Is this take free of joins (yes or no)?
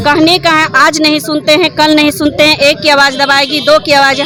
yes